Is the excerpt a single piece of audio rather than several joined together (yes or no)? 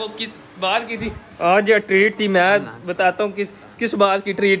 yes